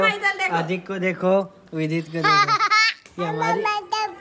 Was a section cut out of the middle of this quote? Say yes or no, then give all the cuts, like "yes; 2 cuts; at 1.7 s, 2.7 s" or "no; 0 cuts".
yes; 1 cut; at 3.0 s